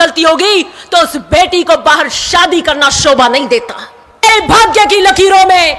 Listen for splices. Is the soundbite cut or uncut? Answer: cut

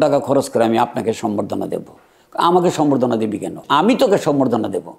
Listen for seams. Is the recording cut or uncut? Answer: cut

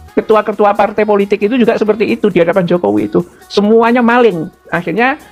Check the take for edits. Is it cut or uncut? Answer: uncut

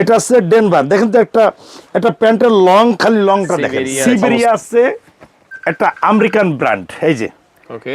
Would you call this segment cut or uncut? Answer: cut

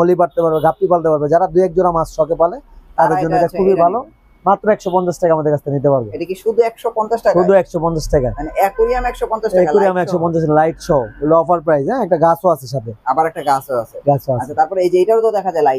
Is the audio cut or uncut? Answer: uncut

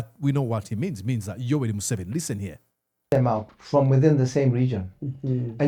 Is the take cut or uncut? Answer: uncut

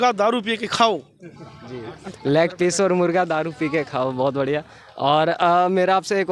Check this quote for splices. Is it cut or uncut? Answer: uncut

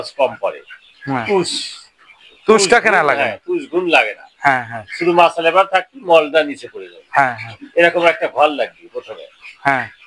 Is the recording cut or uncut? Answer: uncut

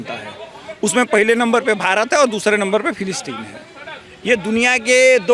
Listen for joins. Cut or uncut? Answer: uncut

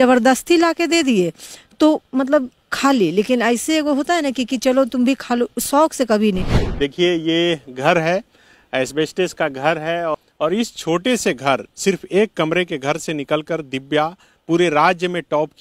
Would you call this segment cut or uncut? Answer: cut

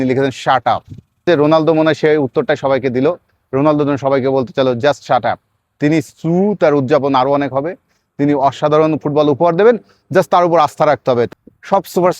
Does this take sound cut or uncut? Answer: cut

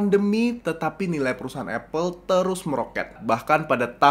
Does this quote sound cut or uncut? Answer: cut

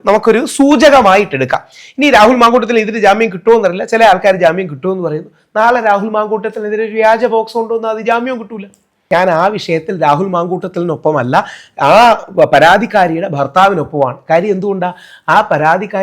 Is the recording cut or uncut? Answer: cut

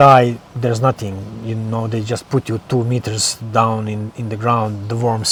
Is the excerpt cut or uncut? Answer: uncut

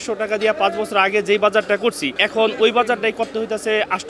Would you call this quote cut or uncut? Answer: cut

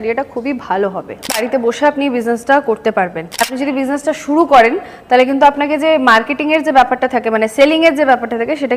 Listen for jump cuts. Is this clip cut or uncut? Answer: cut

